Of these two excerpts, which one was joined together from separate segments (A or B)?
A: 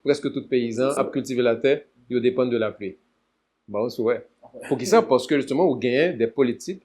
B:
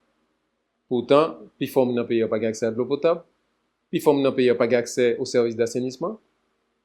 A